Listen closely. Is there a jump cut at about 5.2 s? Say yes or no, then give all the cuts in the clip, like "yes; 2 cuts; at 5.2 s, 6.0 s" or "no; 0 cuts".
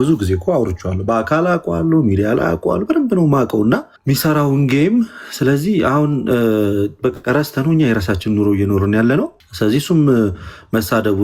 no; 2 cuts; at 3.9 s, 9.4 s